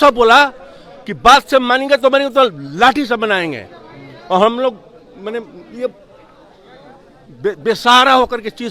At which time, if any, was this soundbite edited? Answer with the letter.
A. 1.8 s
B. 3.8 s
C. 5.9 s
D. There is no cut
D